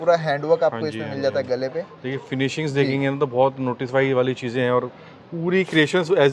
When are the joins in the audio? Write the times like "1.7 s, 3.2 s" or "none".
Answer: none